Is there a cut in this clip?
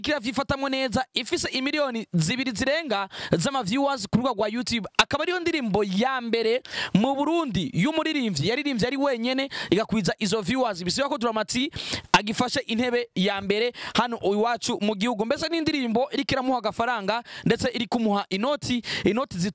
no; 0 cuts

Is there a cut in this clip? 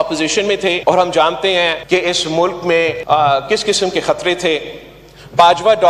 yes; 3 cuts; at 0.8 s, 1.8 s, 3.0 s

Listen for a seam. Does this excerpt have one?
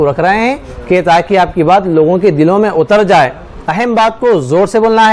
no; 0 cuts

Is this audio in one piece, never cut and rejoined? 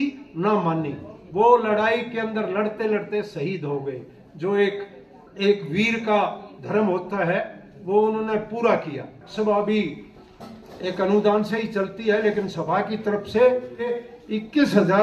no; 2 cuts; at 9.3 s, 13.9 s

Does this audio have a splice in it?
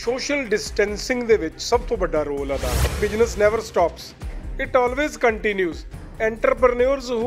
yes; 1 cut; at 2.9 s

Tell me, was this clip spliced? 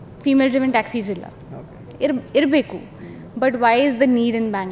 no; 0 cuts

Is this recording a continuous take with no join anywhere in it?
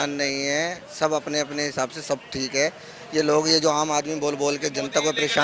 yes; 0 cuts

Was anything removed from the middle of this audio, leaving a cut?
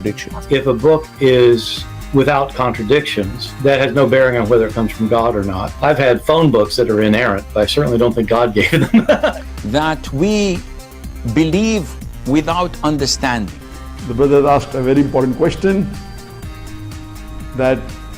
yes; 1 cut; at 9.3 s

